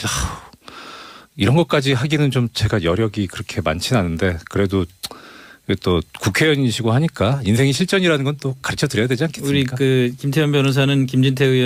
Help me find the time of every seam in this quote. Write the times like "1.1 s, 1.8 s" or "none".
none